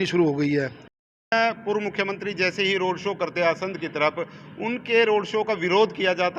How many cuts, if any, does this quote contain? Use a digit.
1